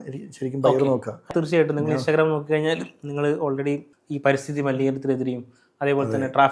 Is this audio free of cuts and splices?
no; 2 cuts; at 1.3 s, 3.9 s

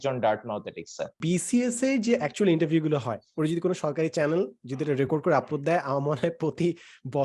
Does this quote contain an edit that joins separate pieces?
yes; 1 cut; at 1.2 s

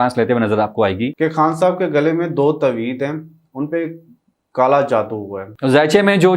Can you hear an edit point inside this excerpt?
yes; 2 cuts; at 1.1 s, 5.5 s

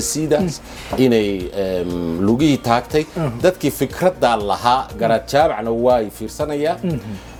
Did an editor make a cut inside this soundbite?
no; 0 cuts

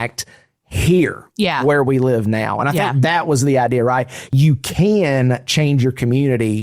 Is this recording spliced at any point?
yes; 1 cut; at 4.2 s

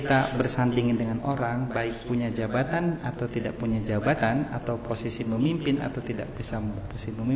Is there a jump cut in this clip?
no; 0 cuts

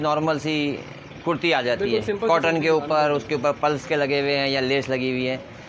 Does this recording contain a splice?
no; 0 cuts

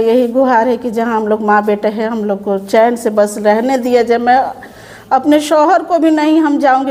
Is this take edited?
no; 0 cuts

